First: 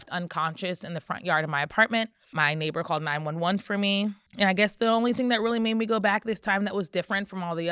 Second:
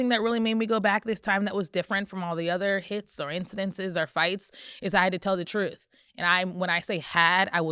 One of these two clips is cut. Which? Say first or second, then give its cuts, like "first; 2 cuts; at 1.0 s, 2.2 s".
first; 2 cuts; at 2.3 s, 4.2 s